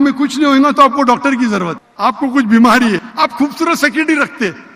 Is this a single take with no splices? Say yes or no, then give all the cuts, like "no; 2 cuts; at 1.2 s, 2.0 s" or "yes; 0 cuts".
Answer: no; 2 cuts; at 1.8 s, 3.1 s